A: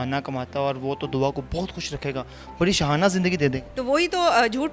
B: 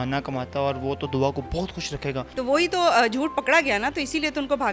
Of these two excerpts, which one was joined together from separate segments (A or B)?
B